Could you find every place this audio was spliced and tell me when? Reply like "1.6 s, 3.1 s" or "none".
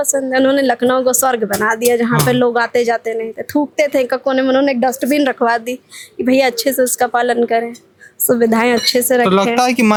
none